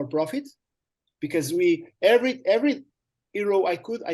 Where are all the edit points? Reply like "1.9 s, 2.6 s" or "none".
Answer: none

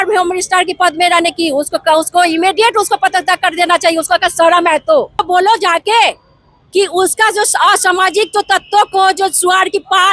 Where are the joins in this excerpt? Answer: 5.2 s

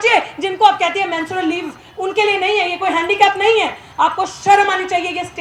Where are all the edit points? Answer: none

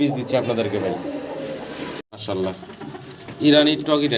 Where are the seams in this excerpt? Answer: 2.1 s

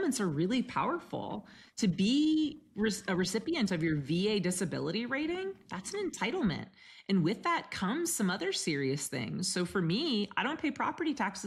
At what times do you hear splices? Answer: none

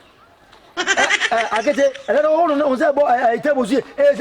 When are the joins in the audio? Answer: none

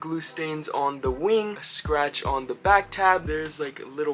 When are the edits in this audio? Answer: none

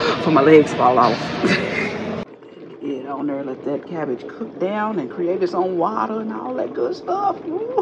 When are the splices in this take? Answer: 2.3 s

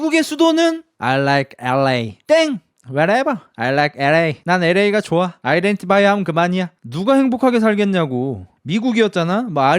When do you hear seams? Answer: 8.5 s

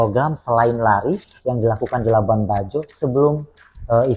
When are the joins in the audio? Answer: none

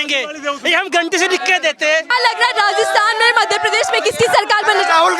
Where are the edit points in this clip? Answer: 2.1 s

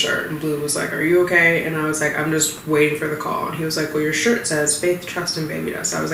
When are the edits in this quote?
none

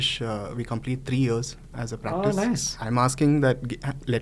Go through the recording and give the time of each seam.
2.7 s

